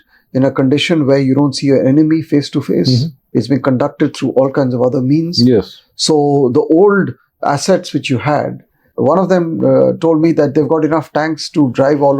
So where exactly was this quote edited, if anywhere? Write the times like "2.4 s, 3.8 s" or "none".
3.2 s, 8.8 s